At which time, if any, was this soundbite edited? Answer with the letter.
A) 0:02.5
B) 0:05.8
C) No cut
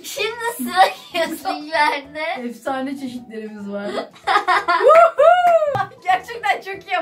B